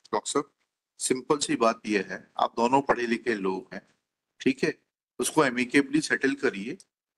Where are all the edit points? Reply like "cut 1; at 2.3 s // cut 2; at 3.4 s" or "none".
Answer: none